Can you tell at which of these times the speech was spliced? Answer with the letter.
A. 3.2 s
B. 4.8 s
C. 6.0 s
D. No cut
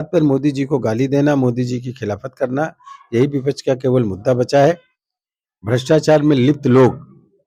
D